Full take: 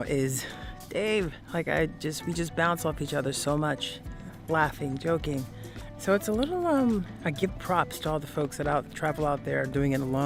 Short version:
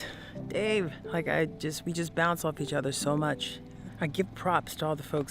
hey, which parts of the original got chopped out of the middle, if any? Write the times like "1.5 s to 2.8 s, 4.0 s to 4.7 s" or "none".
4.3 s to 7.1 s